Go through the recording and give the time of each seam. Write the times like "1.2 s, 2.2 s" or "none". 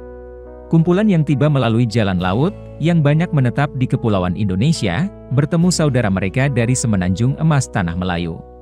none